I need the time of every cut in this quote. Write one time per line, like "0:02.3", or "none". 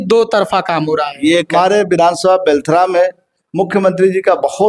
0:01.5

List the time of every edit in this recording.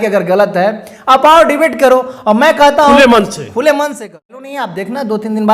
0:04.5

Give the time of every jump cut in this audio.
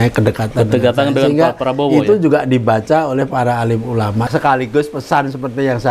0:04.3

